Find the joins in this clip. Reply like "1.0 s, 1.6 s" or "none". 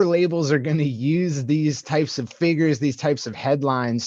none